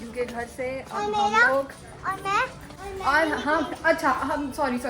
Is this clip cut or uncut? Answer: cut